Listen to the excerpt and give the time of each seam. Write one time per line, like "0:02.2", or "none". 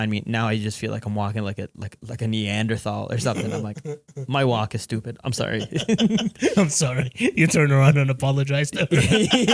none